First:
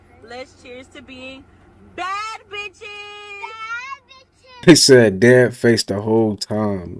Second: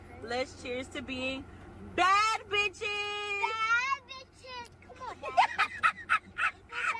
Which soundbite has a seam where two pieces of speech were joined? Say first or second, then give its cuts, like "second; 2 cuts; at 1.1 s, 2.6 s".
first; 1 cut; at 4.6 s